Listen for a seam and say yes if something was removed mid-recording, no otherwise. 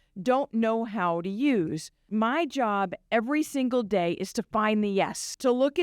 yes